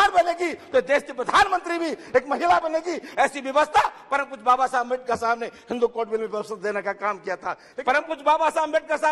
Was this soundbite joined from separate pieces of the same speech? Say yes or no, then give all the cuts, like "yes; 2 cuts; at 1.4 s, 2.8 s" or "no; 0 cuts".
yes; 1 cut; at 7.7 s